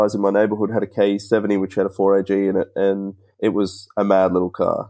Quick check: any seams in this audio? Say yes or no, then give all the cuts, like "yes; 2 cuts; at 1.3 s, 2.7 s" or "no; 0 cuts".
no; 0 cuts